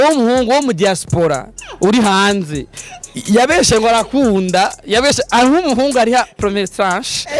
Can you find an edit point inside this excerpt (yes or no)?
no